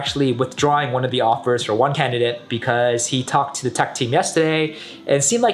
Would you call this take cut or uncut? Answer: uncut